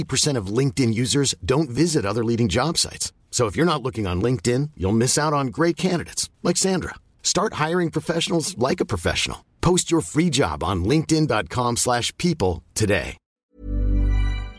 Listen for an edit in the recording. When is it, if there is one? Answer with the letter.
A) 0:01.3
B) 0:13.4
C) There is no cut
B